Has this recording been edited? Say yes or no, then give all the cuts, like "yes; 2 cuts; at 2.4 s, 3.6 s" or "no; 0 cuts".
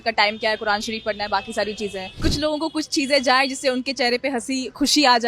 yes; 1 cut; at 2.0 s